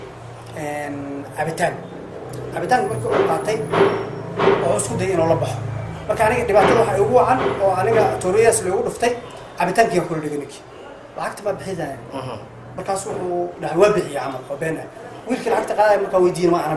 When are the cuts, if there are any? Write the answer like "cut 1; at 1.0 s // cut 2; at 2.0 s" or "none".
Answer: none